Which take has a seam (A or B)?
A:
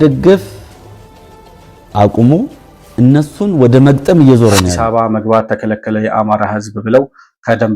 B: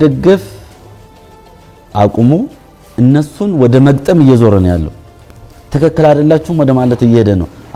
A